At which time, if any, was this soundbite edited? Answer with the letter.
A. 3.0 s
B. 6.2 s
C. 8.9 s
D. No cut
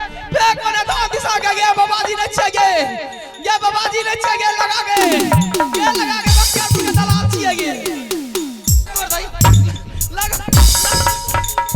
C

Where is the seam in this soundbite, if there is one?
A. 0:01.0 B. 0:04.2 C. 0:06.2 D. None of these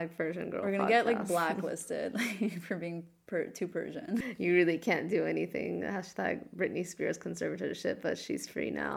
B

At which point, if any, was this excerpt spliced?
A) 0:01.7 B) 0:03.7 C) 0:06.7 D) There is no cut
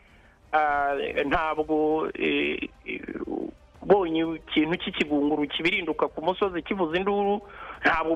D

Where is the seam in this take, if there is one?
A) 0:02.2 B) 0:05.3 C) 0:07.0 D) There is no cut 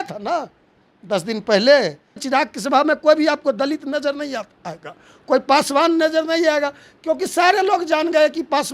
A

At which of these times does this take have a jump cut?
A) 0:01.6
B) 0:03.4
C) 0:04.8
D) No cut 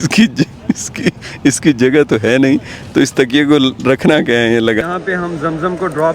C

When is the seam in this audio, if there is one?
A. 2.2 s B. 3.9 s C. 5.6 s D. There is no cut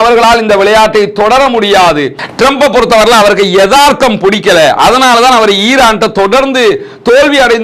A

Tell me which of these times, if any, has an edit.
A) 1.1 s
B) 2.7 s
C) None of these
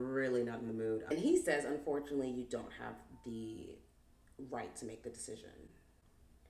A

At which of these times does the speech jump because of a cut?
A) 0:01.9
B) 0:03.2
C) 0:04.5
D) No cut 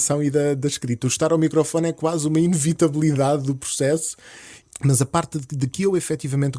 C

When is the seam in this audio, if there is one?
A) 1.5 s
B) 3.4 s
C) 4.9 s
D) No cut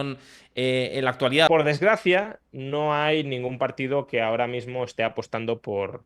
A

